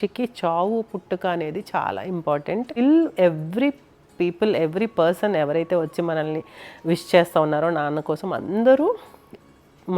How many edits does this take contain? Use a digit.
1